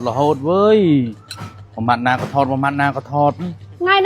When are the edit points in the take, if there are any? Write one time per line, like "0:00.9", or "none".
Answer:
none